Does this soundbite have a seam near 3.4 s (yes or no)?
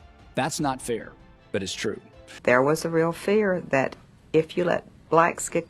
no